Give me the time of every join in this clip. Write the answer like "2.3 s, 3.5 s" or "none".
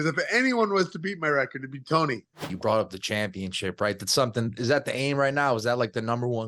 2.5 s